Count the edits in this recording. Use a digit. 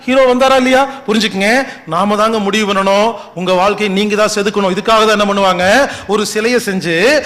0